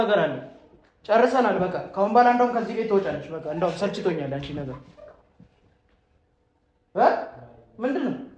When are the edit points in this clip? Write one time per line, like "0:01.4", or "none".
none